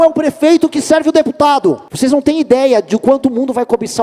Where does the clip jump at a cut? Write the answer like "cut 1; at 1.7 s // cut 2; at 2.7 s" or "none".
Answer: cut 1; at 1.9 s